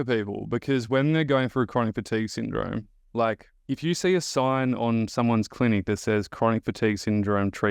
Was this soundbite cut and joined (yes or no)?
no